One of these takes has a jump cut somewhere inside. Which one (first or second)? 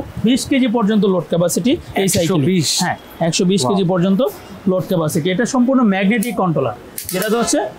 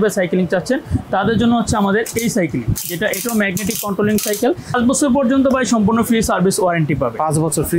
second